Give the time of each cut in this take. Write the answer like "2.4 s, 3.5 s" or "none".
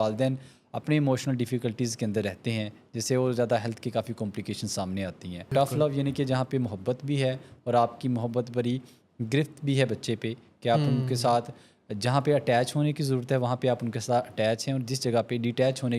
5.5 s